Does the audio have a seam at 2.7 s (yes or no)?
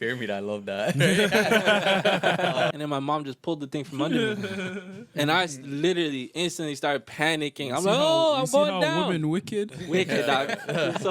yes